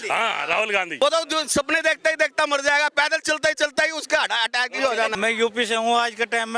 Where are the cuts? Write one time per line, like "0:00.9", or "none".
0:01.0
0:05.1